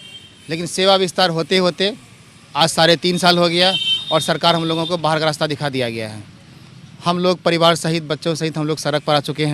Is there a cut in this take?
no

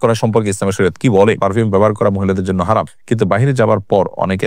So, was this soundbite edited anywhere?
yes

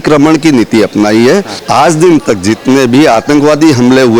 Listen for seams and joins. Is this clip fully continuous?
no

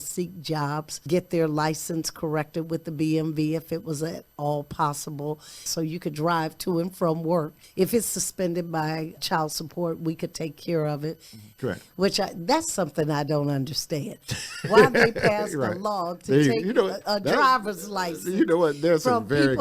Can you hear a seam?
yes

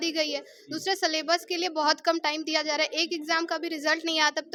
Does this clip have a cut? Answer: no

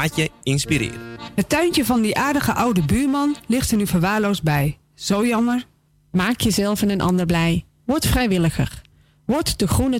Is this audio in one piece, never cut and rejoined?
no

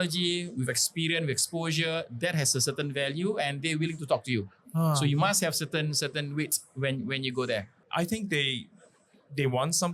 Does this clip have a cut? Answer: yes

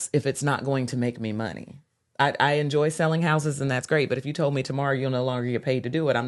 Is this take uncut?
yes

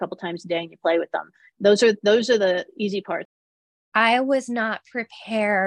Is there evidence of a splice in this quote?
yes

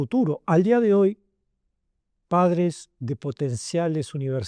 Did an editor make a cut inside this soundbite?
no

